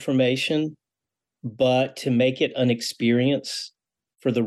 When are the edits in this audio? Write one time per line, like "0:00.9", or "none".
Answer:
none